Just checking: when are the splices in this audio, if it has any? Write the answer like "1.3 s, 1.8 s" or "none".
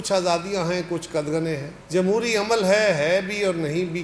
none